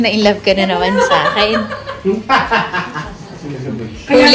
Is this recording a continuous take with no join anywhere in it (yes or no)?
yes